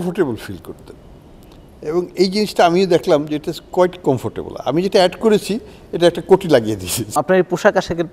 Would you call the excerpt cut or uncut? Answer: cut